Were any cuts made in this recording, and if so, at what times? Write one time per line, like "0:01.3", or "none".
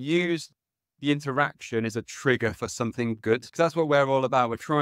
0:03.5